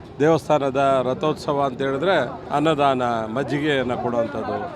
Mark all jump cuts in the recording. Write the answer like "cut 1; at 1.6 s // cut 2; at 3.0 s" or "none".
cut 1; at 2.4 s